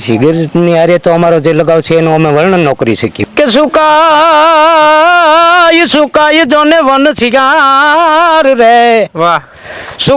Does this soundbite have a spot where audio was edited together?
yes; 1 cut; at 3.2 s

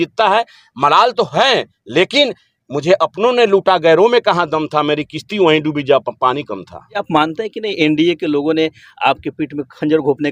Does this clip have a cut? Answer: yes; 1 cut; at 7.0 s

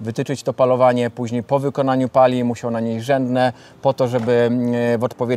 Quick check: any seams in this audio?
no; 0 cuts

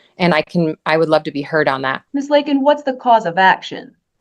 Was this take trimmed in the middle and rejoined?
yes; 1 cut; at 2.0 s

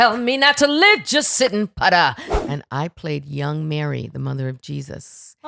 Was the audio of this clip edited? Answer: yes; 1 cut; at 2.3 s

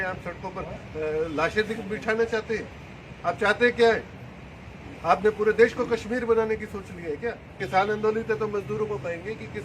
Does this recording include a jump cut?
yes; 1 cut; at 7.6 s

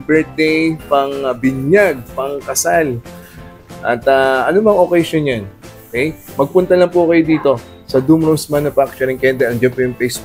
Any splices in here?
no; 0 cuts

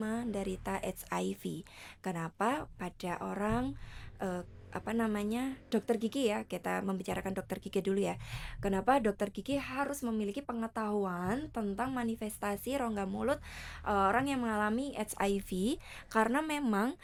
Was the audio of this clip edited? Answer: no; 0 cuts

